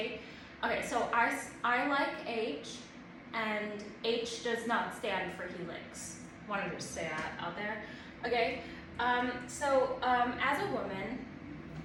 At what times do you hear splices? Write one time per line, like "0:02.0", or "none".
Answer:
none